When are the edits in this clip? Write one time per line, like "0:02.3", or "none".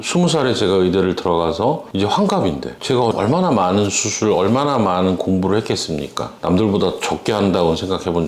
none